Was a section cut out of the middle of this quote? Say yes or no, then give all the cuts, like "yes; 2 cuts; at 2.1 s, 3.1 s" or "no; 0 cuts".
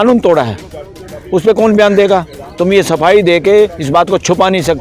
no; 0 cuts